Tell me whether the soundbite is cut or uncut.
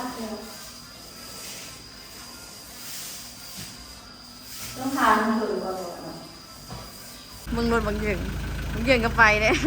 cut